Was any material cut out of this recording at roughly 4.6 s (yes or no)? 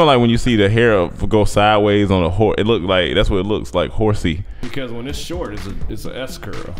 yes